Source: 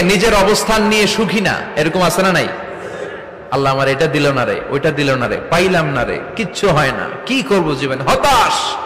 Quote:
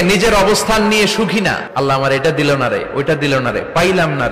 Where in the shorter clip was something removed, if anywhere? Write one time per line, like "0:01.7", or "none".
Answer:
0:01.6